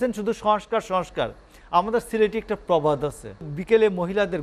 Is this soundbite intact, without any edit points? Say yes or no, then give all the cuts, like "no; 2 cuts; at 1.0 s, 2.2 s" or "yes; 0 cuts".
no; 1 cut; at 3.5 s